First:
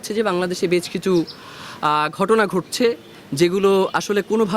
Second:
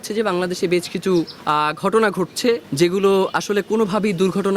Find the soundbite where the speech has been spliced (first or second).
second